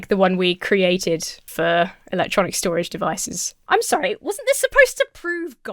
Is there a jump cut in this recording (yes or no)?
no